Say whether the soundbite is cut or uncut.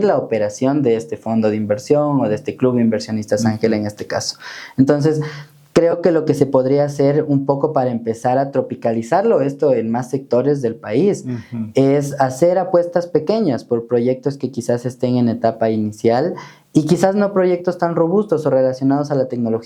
uncut